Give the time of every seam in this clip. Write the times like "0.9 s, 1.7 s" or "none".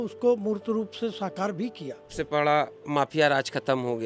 2.1 s